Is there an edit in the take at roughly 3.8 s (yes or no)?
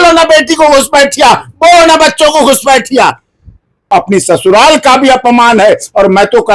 yes